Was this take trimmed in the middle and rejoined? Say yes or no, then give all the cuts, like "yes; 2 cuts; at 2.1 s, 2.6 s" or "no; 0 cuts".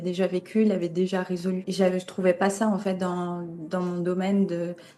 yes; 1 cut; at 1.7 s